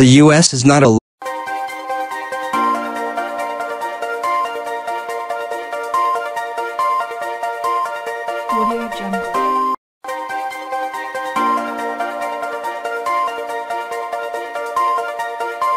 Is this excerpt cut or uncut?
uncut